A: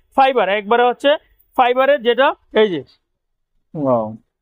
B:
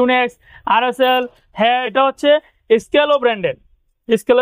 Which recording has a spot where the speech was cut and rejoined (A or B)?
B